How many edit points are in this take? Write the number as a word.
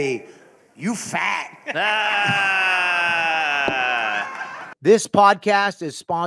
one